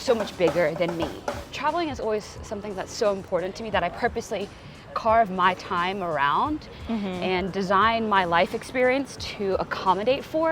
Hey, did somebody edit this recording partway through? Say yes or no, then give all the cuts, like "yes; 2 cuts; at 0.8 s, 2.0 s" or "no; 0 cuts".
yes; 1 cut; at 1.5 s